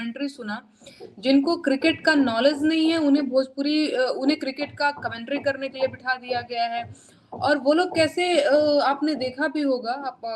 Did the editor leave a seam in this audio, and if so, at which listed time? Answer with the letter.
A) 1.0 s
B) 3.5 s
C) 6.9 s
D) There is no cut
D